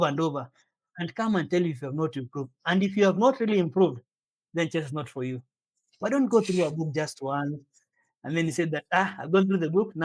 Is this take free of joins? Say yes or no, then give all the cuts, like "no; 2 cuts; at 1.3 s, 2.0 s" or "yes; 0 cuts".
yes; 0 cuts